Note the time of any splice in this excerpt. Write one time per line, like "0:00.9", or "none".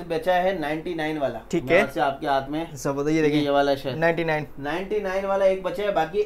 none